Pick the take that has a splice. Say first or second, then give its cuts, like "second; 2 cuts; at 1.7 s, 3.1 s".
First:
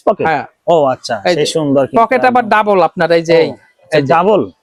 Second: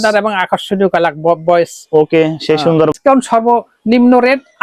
second; 1 cut; at 2.9 s